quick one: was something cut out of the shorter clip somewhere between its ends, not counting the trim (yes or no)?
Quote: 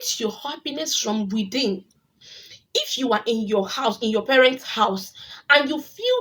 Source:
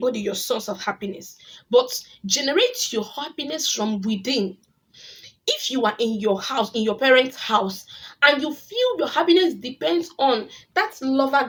no